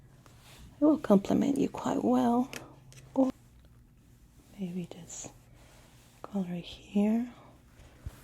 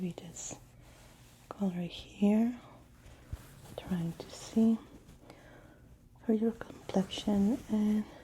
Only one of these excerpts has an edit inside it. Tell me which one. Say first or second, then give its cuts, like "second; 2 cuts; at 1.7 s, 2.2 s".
first; 1 cut; at 3.3 s